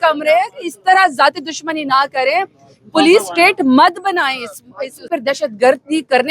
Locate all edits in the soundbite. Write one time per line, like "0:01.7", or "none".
0:05.0